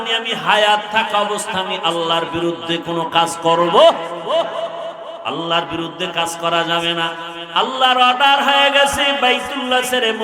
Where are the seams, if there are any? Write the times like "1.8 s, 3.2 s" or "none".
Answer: 7.4 s